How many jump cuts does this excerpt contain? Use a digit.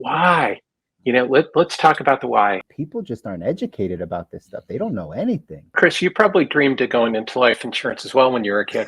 2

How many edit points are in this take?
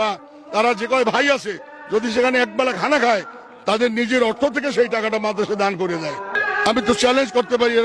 1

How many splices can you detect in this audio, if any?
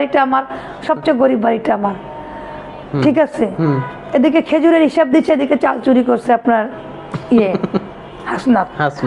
0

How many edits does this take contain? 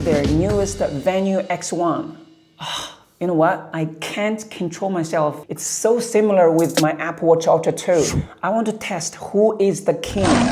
2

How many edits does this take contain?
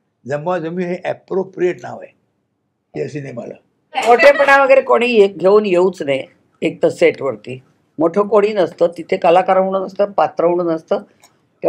1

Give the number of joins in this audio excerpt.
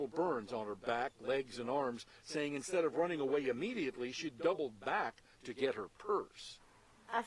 1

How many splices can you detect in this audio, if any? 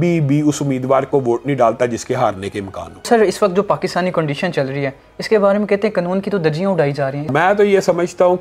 2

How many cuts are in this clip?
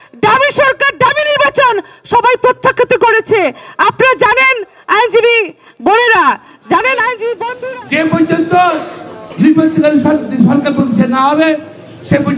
1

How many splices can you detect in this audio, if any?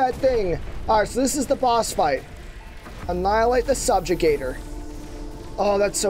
0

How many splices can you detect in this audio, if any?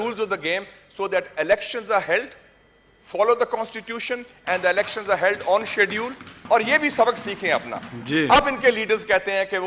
1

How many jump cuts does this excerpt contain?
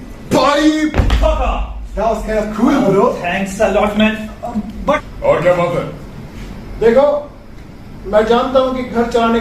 1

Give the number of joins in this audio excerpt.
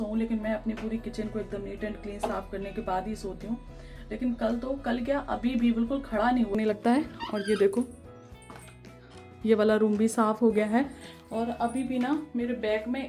1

